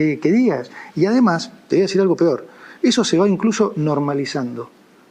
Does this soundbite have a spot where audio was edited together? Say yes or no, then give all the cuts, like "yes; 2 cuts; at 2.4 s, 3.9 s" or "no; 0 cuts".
no; 0 cuts